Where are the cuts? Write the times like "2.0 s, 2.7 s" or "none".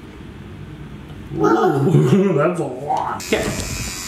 3.2 s